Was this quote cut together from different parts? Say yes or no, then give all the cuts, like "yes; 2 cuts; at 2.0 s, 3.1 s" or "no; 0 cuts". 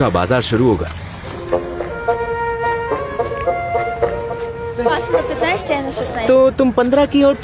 no; 0 cuts